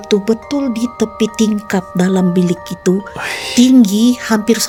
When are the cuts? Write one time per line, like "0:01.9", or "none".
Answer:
none